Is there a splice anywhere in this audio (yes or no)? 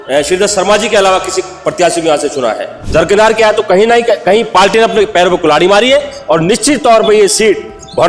yes